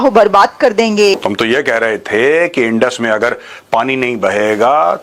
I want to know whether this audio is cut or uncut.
cut